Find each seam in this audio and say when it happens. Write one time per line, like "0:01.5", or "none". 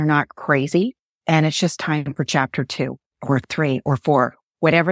0:01.1
0:03.1